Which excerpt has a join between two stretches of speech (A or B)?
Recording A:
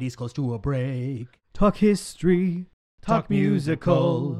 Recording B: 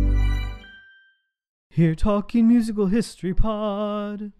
B